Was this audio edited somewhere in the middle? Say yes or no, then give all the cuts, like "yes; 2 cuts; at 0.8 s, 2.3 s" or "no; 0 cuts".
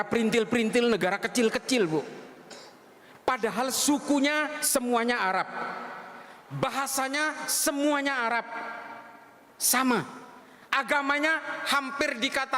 no; 0 cuts